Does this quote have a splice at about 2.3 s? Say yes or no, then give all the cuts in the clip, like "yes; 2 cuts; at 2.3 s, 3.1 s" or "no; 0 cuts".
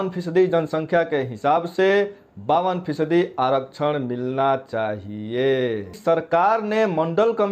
no; 1 cut; at 6.0 s